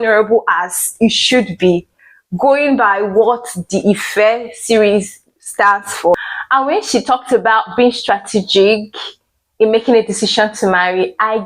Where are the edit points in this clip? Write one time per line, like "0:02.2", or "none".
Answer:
0:06.1